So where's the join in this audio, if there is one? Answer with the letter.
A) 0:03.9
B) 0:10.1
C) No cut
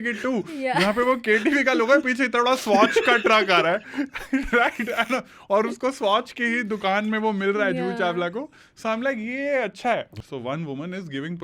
B